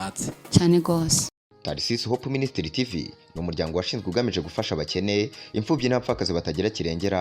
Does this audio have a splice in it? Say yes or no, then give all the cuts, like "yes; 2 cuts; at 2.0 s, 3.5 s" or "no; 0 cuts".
yes; 1 cut; at 1.3 s